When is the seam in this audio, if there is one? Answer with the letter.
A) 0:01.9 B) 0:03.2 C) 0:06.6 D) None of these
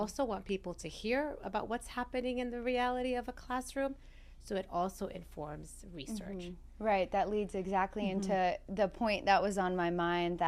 D